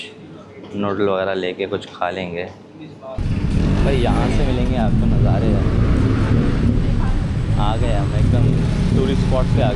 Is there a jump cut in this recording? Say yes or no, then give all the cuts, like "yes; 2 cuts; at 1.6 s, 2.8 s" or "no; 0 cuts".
yes; 1 cut; at 3.2 s